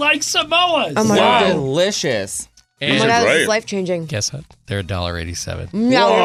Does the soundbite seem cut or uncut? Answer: uncut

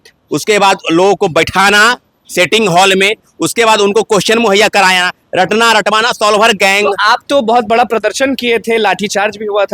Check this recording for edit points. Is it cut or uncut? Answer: uncut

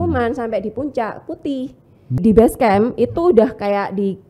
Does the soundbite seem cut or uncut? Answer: cut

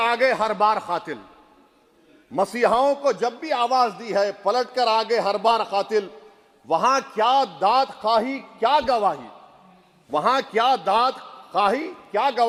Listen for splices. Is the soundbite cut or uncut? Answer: uncut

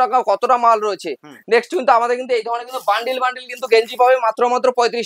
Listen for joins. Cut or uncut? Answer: uncut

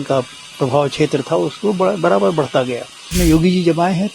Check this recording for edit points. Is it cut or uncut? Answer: cut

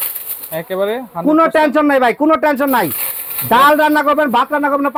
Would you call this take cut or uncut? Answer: uncut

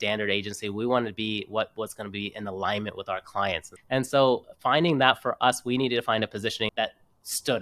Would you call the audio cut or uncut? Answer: cut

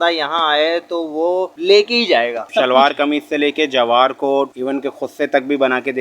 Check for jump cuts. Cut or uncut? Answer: cut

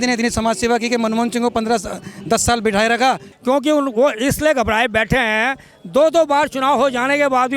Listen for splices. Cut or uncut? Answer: cut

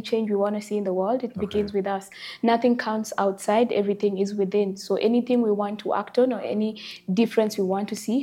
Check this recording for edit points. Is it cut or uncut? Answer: uncut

